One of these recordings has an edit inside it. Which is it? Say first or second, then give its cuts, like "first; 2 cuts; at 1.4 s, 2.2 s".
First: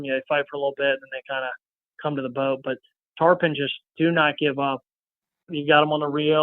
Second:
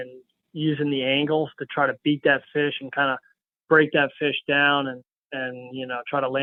first; 1 cut; at 5.5 s